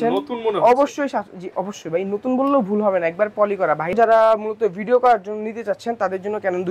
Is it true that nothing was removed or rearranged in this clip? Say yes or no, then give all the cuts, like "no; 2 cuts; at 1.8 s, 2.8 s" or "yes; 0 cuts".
no; 1 cut; at 3.9 s